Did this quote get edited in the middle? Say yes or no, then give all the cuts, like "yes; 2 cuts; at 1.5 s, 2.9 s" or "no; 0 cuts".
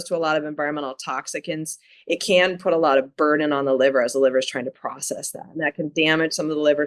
no; 0 cuts